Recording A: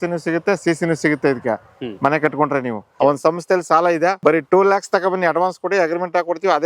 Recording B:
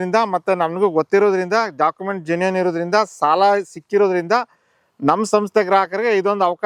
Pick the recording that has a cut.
A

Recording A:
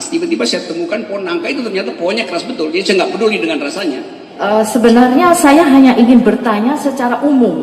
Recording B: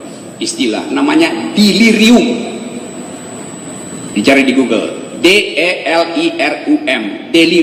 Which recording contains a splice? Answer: A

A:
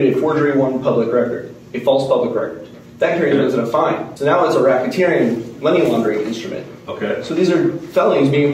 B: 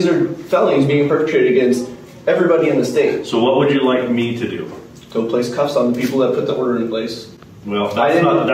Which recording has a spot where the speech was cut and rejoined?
A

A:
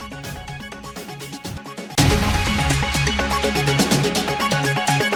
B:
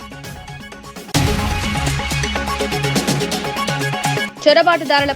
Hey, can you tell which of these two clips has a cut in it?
B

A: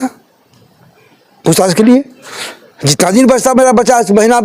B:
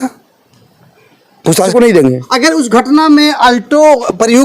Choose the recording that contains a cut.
B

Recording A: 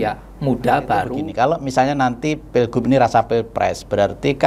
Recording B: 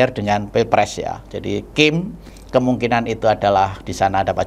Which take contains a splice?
A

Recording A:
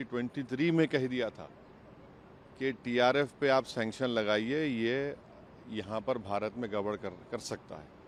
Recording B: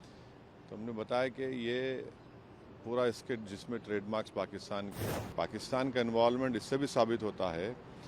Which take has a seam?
B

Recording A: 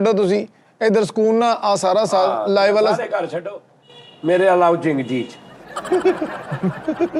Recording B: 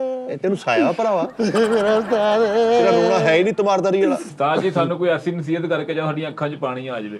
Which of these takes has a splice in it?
B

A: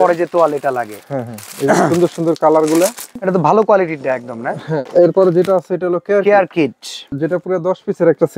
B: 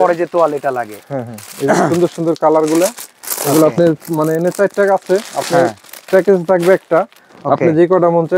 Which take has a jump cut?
A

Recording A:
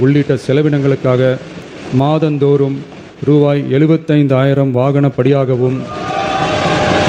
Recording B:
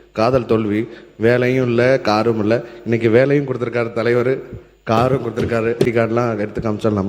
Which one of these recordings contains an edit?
B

